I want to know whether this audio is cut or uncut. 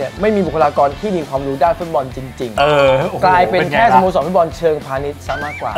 uncut